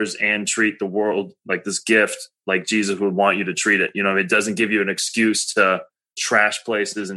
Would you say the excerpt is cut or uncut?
cut